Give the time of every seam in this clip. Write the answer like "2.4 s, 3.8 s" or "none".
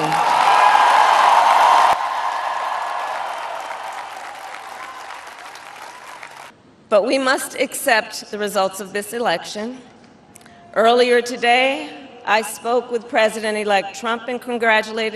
6.6 s